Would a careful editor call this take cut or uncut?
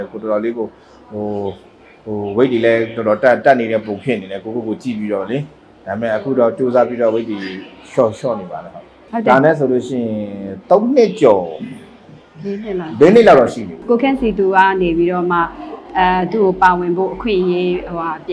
cut